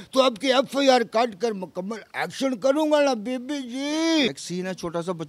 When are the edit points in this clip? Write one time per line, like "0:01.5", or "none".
0:04.3